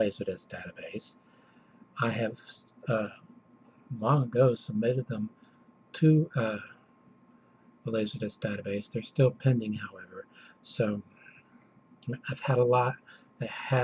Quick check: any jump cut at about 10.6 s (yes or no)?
no